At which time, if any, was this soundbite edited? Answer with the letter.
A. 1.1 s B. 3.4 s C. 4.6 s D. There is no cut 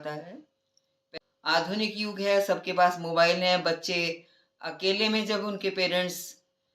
A